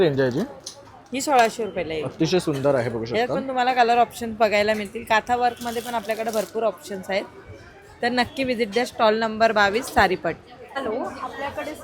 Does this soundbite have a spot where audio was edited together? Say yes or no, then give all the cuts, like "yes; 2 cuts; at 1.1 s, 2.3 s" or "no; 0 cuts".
no; 0 cuts